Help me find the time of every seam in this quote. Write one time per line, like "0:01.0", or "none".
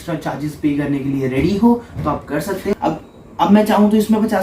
0:02.7